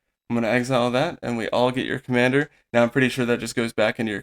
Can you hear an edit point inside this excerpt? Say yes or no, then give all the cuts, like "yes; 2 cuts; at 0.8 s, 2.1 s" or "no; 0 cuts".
no; 0 cuts